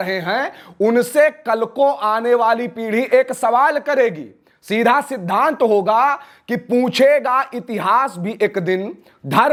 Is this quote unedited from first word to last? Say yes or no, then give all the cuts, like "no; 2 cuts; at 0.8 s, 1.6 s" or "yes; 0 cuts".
yes; 0 cuts